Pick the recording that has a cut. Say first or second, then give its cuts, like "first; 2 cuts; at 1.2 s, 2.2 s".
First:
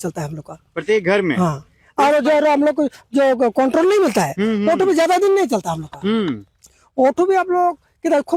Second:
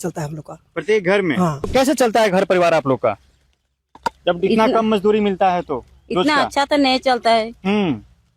second; 1 cut; at 1.7 s